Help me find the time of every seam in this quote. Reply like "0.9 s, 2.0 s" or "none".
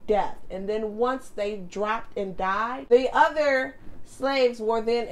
2.7 s